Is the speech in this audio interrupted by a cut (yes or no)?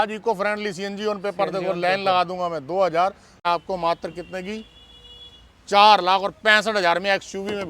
yes